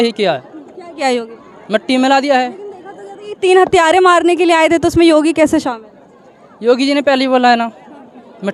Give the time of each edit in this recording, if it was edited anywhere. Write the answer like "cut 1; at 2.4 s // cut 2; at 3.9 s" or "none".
none